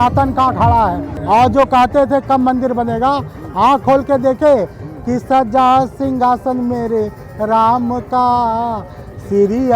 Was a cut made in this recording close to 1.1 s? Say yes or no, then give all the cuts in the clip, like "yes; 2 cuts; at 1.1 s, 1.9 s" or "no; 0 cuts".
yes; 1 cut; at 1.1 s